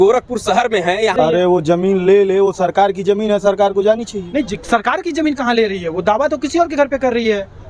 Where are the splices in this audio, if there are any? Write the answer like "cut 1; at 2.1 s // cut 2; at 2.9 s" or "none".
cut 1; at 1.2 s